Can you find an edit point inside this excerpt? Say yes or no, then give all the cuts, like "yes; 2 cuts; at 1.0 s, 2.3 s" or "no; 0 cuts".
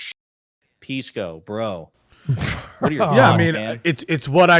no; 0 cuts